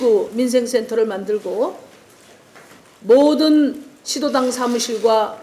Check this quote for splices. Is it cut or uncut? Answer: uncut